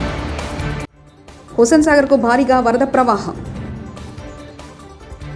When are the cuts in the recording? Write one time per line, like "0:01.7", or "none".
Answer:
0:01.1
0:03.8